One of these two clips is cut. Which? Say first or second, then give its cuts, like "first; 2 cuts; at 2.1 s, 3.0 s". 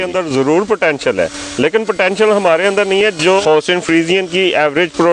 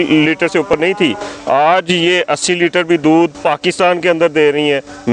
first; 1 cut; at 3.4 s